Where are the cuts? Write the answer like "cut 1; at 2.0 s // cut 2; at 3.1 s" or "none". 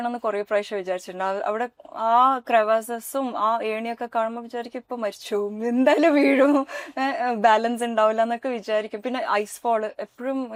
none